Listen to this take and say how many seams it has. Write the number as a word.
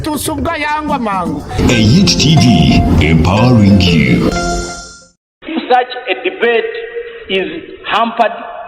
one